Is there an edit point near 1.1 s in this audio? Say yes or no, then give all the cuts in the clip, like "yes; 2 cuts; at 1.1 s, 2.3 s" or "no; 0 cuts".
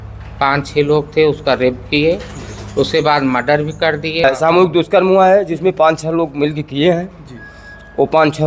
no; 1 cut; at 4.2 s